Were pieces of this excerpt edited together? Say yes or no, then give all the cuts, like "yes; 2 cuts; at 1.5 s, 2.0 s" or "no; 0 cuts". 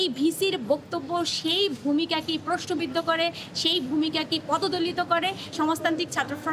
yes; 1 cut; at 5.5 s